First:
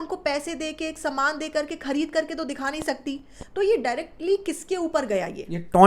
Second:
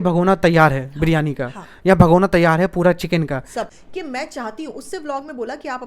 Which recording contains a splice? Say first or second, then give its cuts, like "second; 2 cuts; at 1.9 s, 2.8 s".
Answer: second; 1 cut; at 3.5 s